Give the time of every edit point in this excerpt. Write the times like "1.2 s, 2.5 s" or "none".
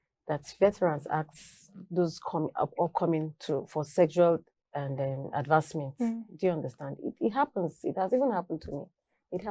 none